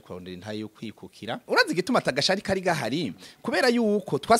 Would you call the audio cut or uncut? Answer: cut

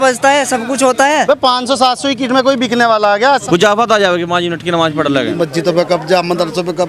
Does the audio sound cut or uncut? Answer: cut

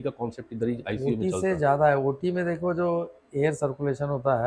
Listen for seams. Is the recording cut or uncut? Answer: uncut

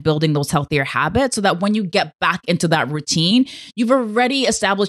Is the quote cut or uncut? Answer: uncut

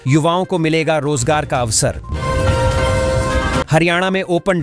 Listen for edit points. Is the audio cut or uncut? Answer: cut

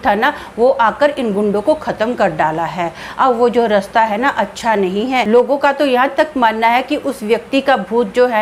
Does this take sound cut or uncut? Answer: uncut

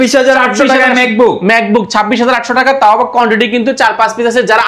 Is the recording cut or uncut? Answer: uncut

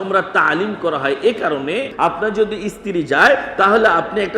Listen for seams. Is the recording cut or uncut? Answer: cut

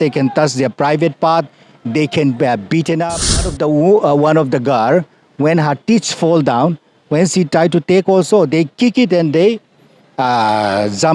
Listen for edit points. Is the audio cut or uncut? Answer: cut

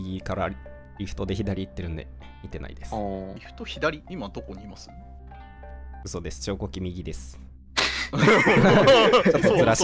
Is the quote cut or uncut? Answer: cut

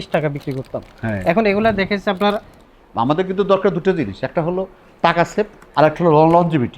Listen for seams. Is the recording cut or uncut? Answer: cut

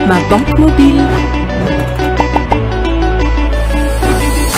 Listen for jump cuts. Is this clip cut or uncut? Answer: uncut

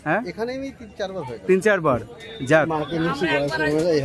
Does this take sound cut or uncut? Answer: uncut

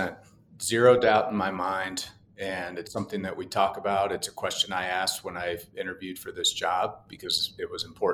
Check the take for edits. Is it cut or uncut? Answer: uncut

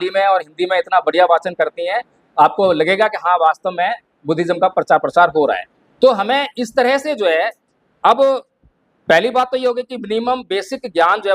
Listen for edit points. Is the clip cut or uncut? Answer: uncut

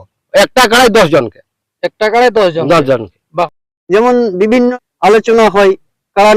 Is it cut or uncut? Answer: cut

